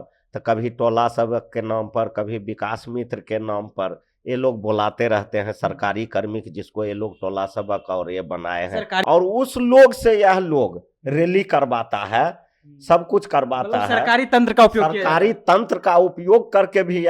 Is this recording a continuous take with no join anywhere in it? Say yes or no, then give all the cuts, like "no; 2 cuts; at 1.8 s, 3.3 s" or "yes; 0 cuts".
no; 1 cut; at 9.0 s